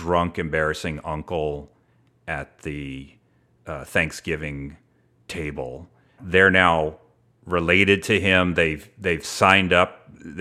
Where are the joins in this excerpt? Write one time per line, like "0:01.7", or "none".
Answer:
0:06.2